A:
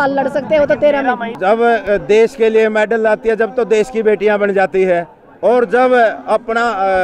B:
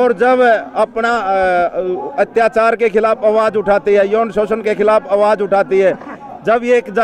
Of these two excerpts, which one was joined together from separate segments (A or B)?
A